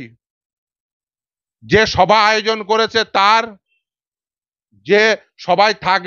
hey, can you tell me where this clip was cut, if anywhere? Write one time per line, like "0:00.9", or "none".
none